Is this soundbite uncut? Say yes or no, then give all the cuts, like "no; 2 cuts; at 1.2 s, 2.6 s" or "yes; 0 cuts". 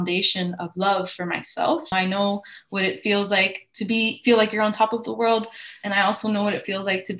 no; 1 cut; at 1.9 s